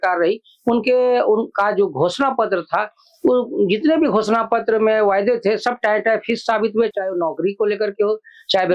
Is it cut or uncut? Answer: uncut